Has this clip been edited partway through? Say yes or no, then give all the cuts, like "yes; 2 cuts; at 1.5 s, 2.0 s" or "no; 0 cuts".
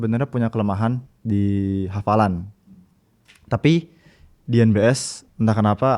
yes; 1 cut; at 1.1 s